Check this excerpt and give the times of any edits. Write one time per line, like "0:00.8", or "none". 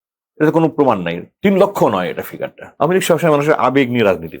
0:02.7